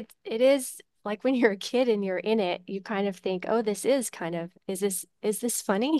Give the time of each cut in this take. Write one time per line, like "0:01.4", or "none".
none